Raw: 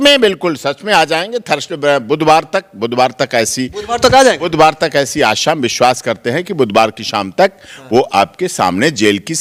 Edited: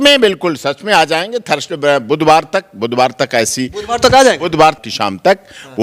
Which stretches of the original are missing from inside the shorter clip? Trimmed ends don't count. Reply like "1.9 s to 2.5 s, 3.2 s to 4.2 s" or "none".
4.8 s to 7.0 s